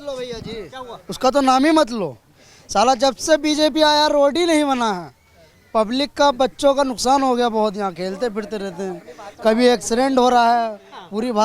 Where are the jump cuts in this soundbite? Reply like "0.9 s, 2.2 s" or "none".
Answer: none

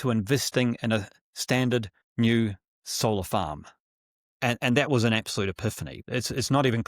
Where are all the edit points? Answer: 5.9 s

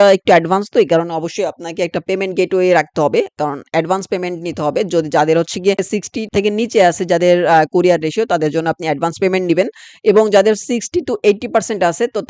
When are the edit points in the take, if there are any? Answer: none

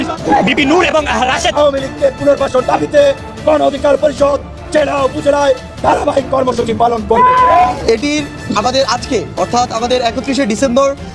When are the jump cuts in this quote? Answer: 7.7 s

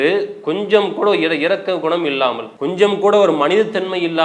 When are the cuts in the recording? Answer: 2.5 s

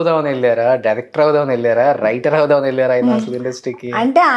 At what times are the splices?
none

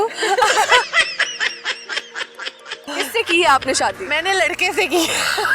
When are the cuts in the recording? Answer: 0.8 s, 2.9 s

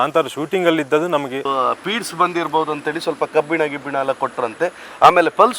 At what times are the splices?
1.4 s

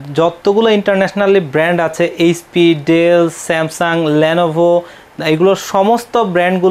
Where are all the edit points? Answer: none

